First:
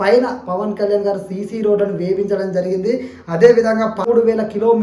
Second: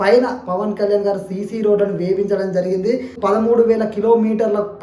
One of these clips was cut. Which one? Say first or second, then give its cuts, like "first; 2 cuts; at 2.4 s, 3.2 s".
second; 1 cut; at 3.3 s